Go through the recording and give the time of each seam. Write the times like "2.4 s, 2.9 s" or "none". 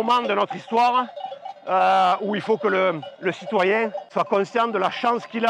4.0 s